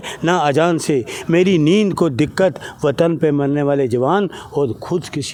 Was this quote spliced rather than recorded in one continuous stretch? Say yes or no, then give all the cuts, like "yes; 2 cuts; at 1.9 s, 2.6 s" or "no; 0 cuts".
no; 0 cuts